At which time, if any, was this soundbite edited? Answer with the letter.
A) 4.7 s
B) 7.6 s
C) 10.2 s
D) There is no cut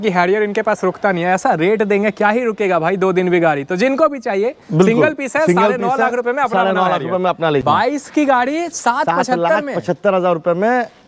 B